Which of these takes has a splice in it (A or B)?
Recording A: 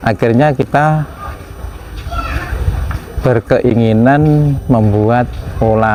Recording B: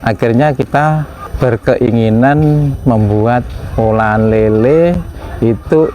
B